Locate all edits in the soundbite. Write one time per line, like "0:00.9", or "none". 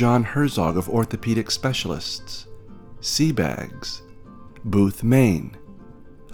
none